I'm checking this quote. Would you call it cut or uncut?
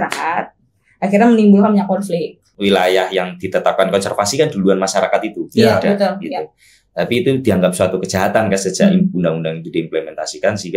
cut